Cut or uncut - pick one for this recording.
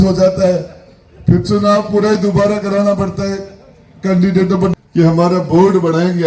cut